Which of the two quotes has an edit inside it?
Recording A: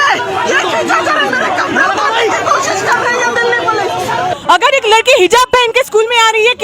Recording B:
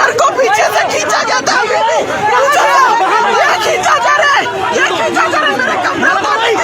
A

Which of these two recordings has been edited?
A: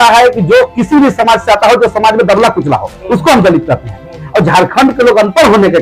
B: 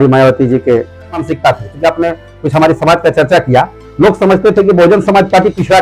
B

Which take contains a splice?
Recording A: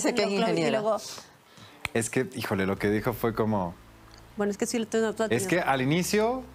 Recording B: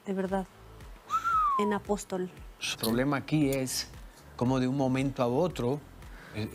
B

